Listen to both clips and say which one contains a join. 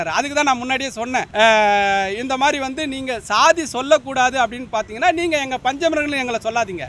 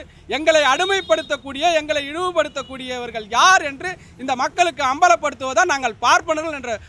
first; 1 cut; at 1.3 s

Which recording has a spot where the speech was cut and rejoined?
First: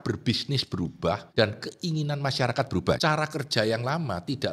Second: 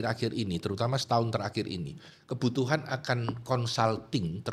first; 2 cuts; at 1.2 s, 3.0 s

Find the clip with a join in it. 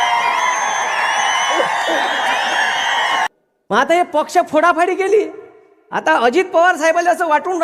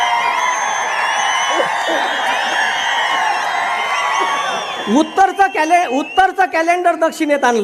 first; 1 cut; at 3.3 s

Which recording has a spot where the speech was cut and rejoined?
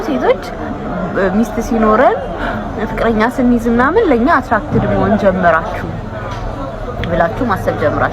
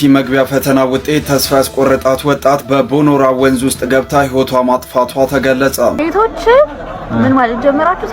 second; 1 cut; at 6.0 s

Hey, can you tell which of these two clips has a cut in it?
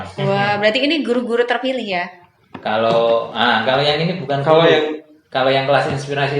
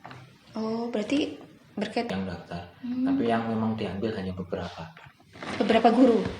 second; 1 cut; at 2.1 s

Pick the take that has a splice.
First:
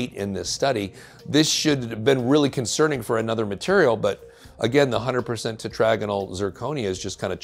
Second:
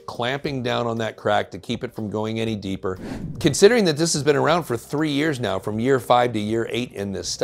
second; 1 cut; at 3.1 s

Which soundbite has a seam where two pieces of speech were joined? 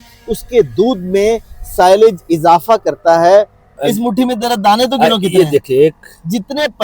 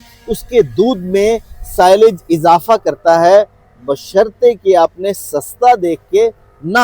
first; 1 cut; at 3.8 s

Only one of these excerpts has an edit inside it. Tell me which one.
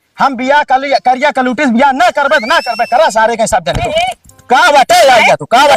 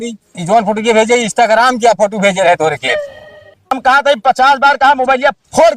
second; 1 cut; at 3.8 s

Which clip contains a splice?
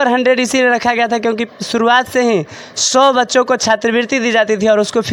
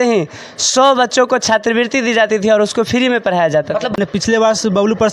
second; 1 cut; at 3.9 s

